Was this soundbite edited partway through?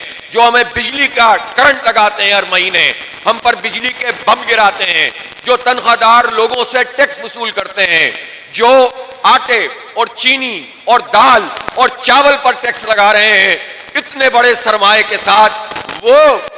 no; 0 cuts

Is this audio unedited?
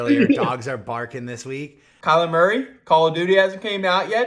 no; 1 cut; at 1.9 s

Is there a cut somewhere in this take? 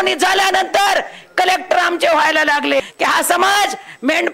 yes; 1 cut; at 2.9 s

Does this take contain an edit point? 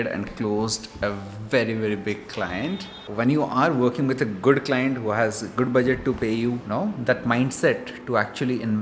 yes; 2 cuts; at 2.9 s, 6.6 s

